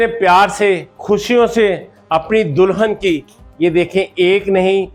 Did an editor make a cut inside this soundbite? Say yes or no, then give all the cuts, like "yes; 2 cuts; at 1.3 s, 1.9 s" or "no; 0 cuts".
no; 0 cuts